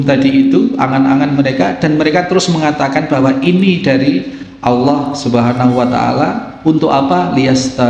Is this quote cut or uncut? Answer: uncut